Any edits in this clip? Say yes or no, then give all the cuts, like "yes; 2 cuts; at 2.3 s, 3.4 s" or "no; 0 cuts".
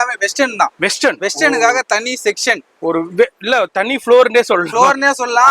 no; 0 cuts